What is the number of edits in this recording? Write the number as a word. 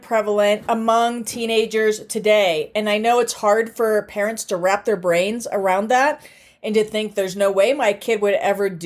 zero